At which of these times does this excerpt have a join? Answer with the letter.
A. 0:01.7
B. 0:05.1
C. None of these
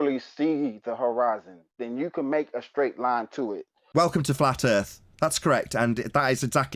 C